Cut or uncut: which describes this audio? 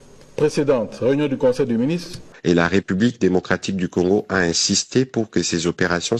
cut